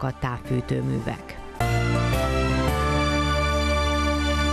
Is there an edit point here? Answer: no; 0 cuts

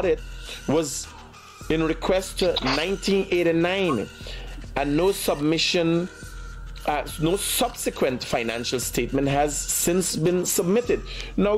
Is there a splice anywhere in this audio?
no; 0 cuts

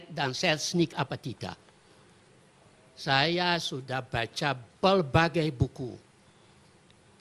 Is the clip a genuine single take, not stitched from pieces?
no; 1 cut; at 3.4 s

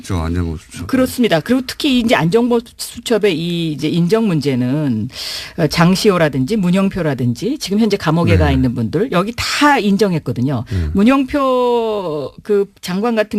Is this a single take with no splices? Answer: yes; 0 cuts

